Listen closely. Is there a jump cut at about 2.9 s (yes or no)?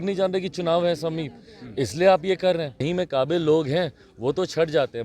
yes